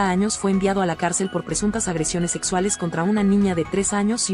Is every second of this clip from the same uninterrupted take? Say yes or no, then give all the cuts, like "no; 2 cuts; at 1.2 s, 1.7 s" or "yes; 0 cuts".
yes; 0 cuts